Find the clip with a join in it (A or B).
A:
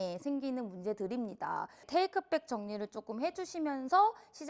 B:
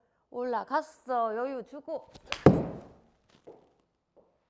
A